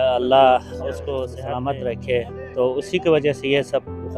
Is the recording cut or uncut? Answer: cut